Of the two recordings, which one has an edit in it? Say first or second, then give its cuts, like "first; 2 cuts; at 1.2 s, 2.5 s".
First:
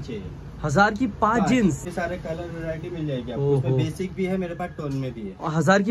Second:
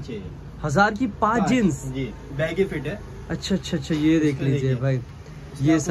first; 1 cut; at 1.9 s